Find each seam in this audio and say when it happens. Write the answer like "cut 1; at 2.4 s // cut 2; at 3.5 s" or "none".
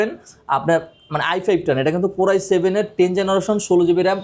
none